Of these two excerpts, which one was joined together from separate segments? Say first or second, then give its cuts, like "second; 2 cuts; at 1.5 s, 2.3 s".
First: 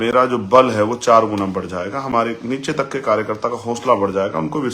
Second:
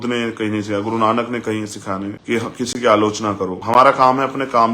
second; 2 cuts; at 2.2 s, 3.6 s